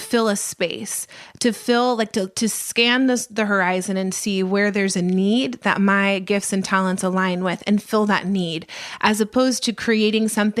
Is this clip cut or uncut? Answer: uncut